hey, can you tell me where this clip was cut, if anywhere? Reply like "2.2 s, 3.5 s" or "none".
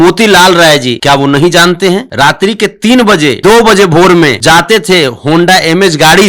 0.9 s, 2.1 s, 3.4 s, 4.4 s